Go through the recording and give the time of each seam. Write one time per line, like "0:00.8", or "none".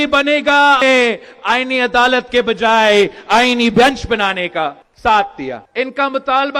0:00.8
0:05.6